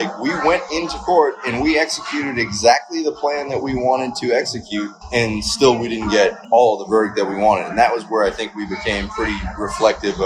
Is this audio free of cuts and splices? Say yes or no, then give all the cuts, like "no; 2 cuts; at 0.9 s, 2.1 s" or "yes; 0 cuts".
yes; 0 cuts